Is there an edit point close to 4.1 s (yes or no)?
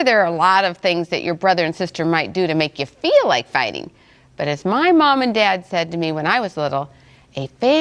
no